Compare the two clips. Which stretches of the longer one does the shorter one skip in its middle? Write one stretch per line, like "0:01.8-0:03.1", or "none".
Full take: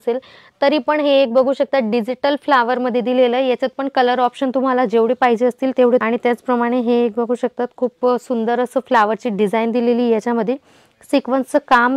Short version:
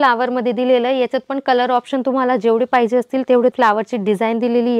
0:06.0-0:08.9